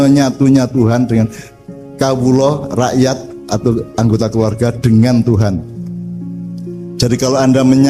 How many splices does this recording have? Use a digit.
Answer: 2